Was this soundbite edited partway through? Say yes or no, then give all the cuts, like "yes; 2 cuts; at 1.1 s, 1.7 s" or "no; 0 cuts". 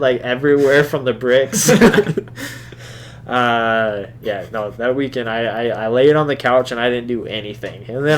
no; 0 cuts